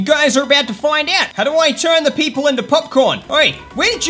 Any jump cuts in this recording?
yes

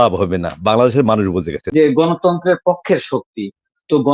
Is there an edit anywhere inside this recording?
yes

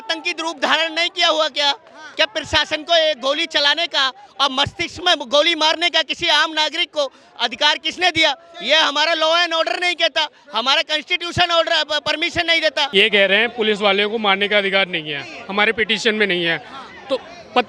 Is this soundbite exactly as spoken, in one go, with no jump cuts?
no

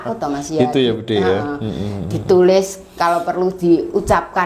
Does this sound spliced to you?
no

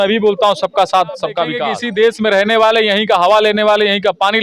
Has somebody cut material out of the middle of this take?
yes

